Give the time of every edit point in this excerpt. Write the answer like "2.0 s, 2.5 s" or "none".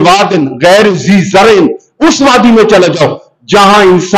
none